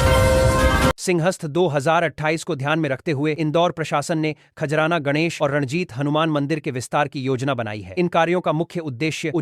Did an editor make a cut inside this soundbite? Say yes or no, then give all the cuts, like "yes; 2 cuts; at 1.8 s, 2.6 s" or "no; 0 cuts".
yes; 1 cut; at 1.0 s